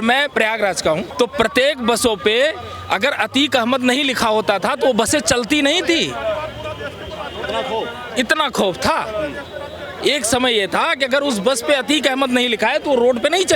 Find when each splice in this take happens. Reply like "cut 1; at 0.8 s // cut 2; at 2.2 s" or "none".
cut 1; at 1.1 s